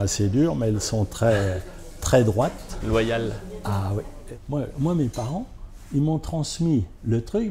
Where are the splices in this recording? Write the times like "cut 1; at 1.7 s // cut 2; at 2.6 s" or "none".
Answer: cut 1; at 4.1 s